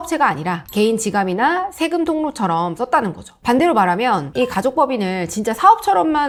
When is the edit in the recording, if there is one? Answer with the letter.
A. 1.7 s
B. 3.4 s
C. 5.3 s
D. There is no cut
D